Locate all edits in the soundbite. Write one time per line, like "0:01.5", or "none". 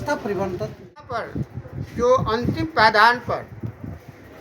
0:01.1